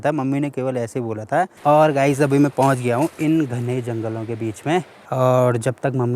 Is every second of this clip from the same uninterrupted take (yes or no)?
no